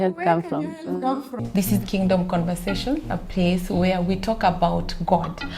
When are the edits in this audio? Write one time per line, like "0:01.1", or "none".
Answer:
0:01.4